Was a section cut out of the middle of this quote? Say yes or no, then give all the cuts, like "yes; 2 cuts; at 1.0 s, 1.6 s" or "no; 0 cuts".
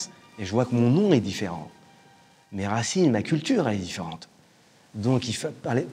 no; 0 cuts